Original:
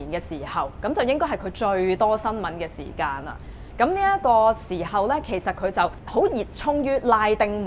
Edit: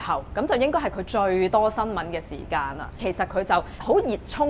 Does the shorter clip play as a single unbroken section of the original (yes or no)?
no